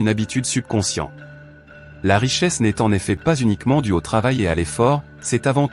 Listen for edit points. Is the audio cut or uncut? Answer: uncut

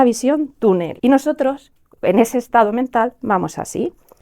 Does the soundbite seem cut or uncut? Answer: cut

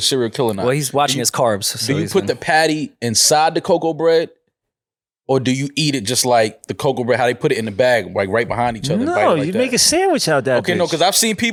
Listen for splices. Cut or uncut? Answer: uncut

